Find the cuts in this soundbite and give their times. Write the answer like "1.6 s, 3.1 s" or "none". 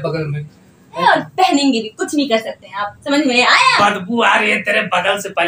1.0 s